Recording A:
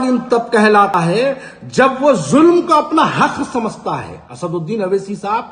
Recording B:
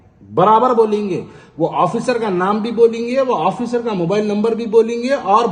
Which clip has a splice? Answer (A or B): A